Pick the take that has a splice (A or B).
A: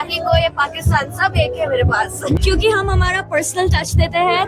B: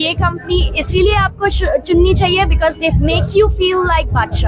A